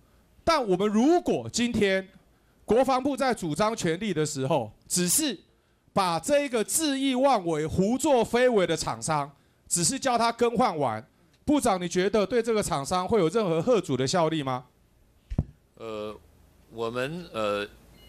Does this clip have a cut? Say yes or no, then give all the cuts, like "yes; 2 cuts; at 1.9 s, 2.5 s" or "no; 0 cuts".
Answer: no; 0 cuts